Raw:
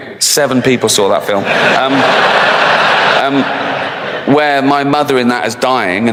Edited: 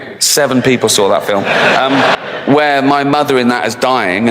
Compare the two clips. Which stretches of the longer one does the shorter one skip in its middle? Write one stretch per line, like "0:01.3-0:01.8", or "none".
0:02.2-0:04.0